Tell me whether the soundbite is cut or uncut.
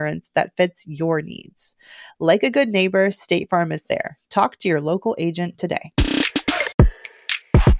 cut